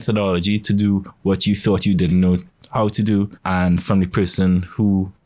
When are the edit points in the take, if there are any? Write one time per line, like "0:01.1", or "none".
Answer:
0:03.4